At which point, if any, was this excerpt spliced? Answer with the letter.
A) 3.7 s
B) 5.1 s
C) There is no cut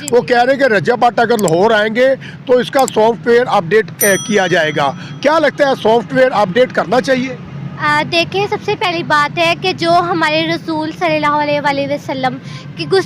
C